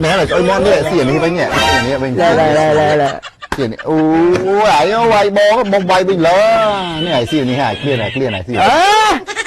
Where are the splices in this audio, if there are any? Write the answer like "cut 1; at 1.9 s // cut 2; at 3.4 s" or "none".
none